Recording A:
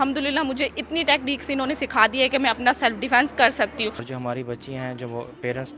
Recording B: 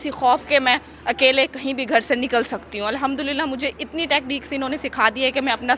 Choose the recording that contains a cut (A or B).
A